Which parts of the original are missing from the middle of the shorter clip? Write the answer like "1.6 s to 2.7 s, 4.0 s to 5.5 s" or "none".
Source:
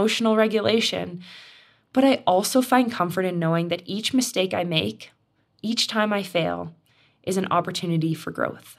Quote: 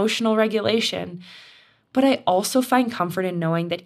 none